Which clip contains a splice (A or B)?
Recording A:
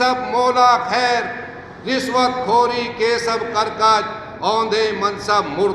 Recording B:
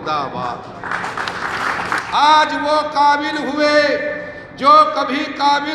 B